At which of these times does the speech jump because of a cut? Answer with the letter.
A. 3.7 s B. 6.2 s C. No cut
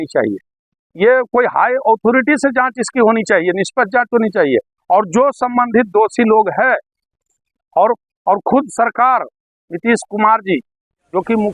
C